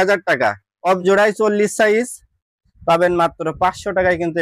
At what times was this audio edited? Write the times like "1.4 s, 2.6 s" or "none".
1.0 s